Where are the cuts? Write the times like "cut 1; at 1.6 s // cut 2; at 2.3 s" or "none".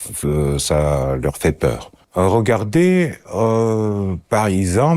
cut 1; at 1.9 s